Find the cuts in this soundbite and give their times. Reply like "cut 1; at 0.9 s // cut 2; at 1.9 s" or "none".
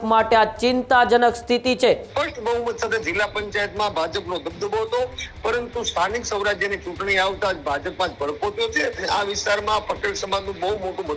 cut 1; at 2.1 s // cut 2; at 9.0 s